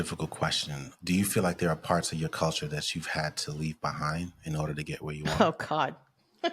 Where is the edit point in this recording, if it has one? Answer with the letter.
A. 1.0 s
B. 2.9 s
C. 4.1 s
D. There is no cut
A